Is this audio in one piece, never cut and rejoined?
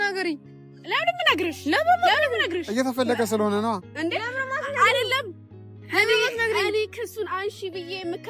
yes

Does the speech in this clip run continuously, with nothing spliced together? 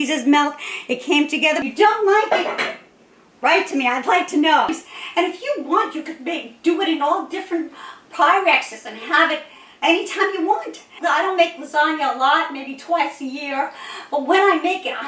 no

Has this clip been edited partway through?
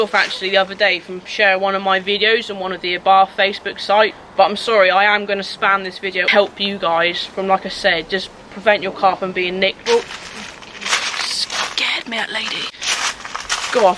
yes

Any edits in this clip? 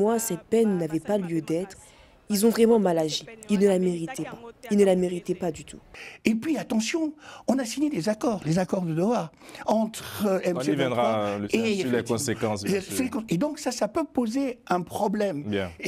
yes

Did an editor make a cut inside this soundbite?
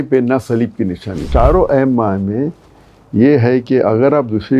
yes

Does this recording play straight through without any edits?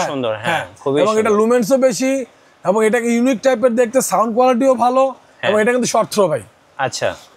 yes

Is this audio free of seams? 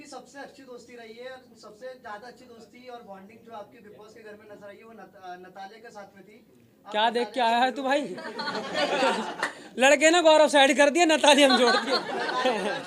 yes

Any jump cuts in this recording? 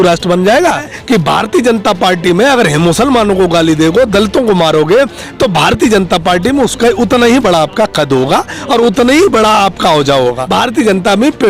yes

